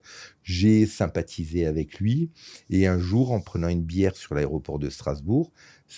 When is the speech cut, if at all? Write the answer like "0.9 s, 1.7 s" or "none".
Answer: none